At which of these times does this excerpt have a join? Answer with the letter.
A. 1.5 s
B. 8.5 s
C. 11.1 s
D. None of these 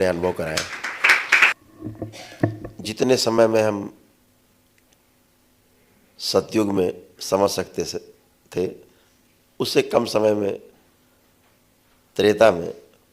A